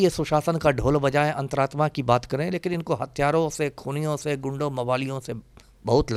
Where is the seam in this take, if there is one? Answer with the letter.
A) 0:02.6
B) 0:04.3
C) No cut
C